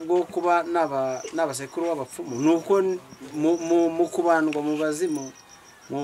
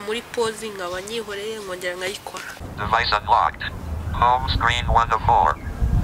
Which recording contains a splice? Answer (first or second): second